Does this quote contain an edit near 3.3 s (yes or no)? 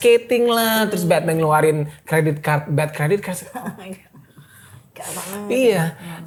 no